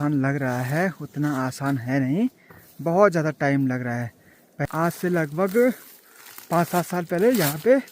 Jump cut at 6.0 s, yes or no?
no